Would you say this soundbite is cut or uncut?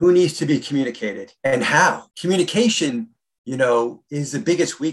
cut